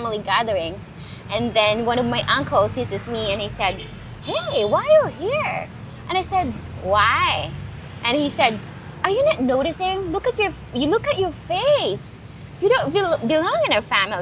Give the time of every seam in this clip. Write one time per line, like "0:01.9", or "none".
none

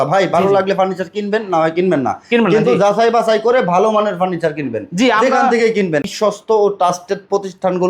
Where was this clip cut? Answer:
0:06.1

